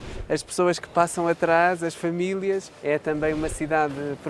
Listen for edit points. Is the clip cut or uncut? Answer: uncut